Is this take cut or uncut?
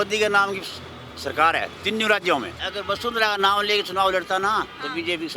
cut